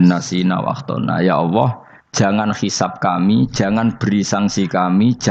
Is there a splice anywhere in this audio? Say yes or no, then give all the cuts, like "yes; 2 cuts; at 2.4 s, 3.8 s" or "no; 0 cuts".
no; 0 cuts